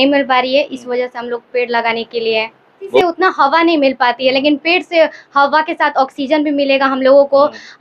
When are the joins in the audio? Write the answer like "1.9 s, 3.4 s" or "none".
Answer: 3.0 s